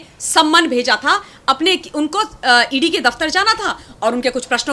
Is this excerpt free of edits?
yes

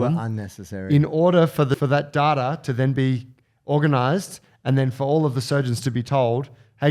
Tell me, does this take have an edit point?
yes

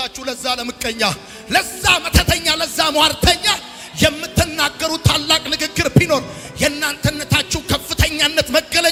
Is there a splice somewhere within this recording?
no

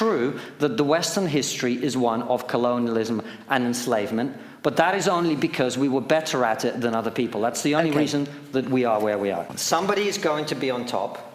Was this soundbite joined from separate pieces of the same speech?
yes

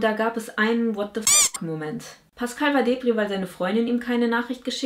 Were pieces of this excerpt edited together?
yes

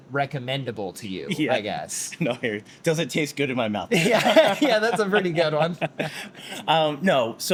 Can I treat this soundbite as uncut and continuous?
yes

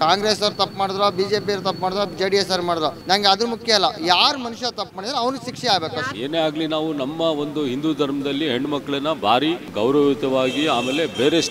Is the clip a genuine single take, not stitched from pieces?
no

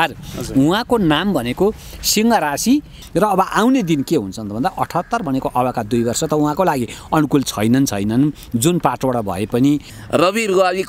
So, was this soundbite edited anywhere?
yes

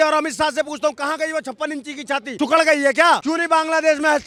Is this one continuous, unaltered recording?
yes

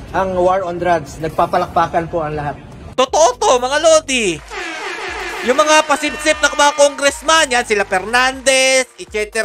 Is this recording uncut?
yes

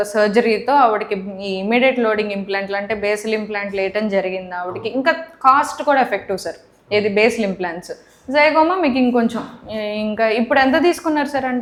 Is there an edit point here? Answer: no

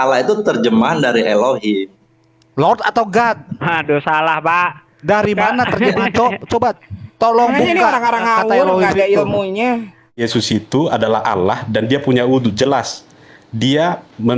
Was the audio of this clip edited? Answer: yes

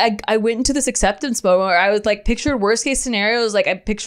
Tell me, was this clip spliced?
no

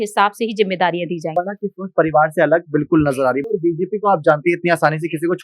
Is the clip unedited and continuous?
no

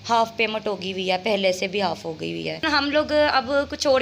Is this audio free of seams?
no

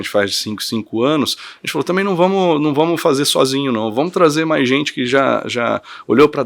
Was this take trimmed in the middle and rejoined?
no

